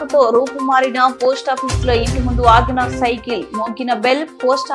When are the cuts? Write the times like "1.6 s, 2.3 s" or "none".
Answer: none